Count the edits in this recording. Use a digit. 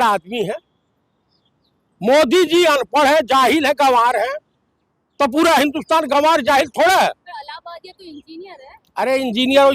0